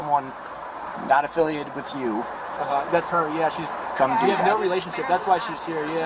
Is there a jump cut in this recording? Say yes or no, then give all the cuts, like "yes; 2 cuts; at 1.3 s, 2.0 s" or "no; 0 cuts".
no; 0 cuts